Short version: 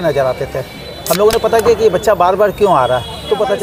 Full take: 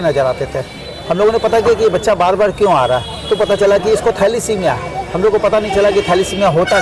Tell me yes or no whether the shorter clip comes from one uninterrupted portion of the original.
yes